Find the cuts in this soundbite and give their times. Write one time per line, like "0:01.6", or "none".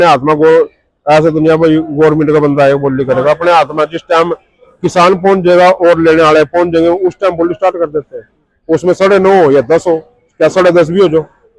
none